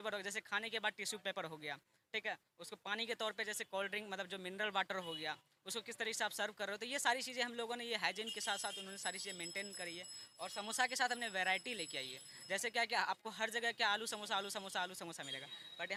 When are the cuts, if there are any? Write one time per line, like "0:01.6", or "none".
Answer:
none